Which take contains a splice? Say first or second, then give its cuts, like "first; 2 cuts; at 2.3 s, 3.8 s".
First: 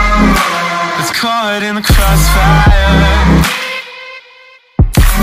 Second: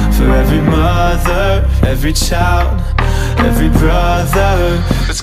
first; 1 cut; at 0.9 s